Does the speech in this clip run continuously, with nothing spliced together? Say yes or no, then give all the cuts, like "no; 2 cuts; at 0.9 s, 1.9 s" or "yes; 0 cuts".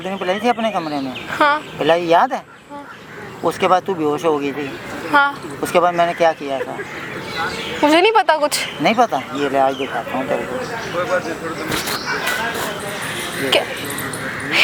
yes; 0 cuts